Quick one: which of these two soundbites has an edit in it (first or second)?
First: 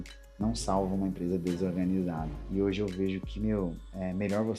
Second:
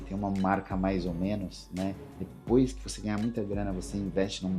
first